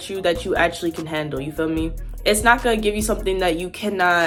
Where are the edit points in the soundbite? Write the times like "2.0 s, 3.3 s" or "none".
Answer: none